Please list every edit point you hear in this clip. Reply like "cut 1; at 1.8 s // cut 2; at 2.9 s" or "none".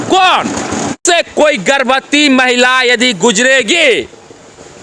cut 1; at 1.0 s